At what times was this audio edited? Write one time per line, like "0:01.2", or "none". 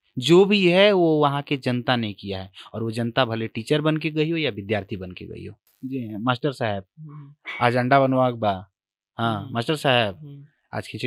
0:05.8

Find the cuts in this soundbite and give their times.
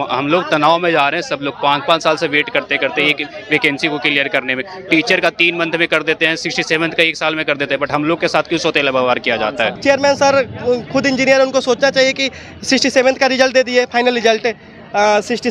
0:09.8

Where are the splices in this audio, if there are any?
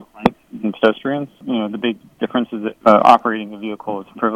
0:01.4
0:02.8

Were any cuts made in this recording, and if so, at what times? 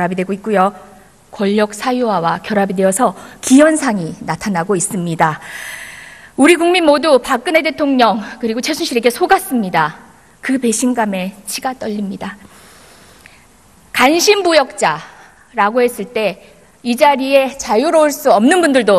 0:10.9

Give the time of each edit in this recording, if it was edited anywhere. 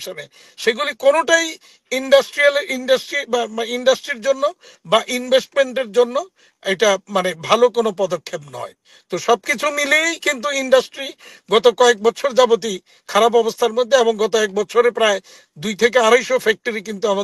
none

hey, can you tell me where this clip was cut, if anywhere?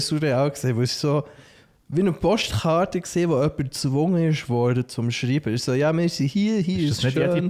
none

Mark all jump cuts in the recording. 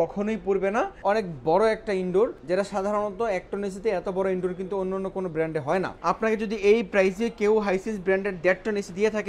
0:00.9
0:02.4
0:05.9

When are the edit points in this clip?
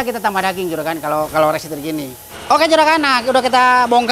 0:02.3

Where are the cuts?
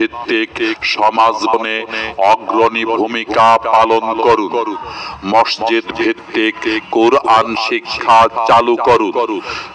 0:01.5

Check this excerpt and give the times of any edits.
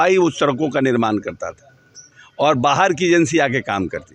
none

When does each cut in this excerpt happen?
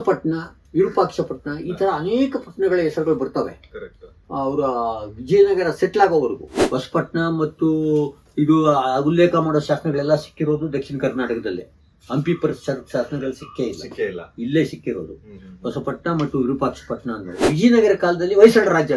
0:06.6
0:17.5

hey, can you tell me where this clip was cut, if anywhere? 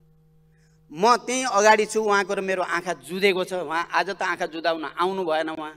none

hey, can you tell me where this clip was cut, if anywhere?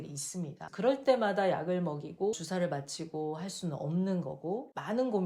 0:02.3

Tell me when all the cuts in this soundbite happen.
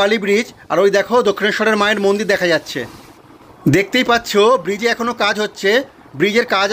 none

